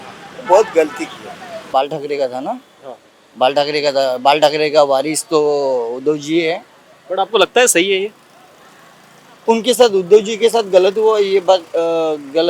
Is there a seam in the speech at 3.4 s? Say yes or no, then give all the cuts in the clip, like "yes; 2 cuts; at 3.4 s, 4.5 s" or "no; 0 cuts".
no; 1 cut; at 1.7 s